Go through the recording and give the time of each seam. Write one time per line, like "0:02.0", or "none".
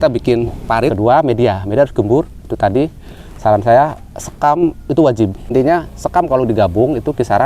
0:00.9
0:05.5